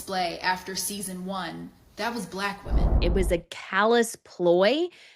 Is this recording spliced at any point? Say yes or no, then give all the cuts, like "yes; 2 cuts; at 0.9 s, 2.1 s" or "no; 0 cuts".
yes; 1 cut; at 3.0 s